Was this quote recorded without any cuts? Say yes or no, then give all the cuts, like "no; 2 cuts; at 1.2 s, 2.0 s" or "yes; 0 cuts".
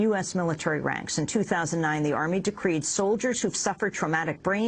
no; 1 cut; at 3.1 s